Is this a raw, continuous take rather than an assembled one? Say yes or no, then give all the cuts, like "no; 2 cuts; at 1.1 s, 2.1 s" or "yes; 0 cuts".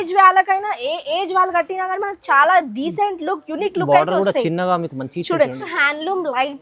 no; 1 cut; at 5.7 s